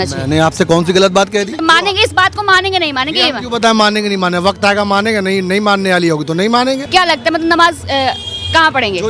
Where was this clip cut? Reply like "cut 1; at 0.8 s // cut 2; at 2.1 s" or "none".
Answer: cut 1; at 1.5 s // cut 2; at 6.8 s